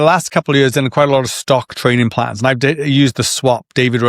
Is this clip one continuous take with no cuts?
yes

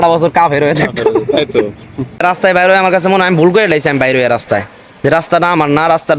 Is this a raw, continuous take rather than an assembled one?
no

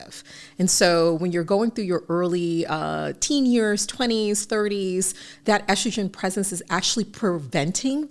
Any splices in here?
no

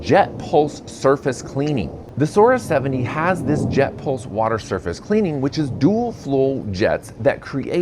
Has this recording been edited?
yes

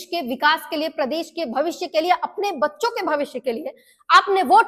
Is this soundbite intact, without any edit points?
yes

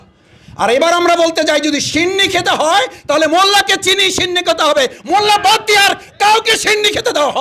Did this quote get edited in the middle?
no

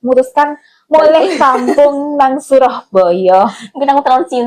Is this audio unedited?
yes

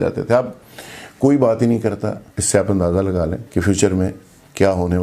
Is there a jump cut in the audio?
yes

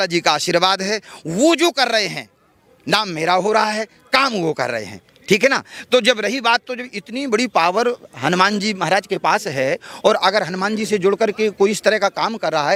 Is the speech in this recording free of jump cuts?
yes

